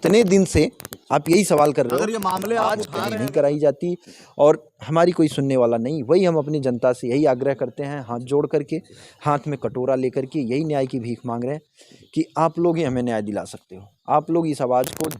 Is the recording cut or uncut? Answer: cut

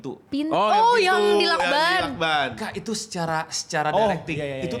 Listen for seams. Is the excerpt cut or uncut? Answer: uncut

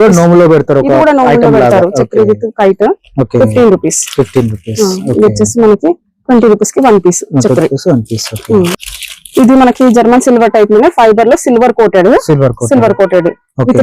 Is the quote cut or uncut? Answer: cut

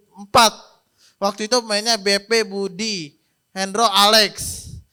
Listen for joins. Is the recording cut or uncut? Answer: uncut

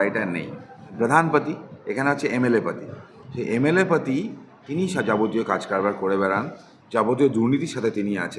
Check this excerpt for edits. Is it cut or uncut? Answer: cut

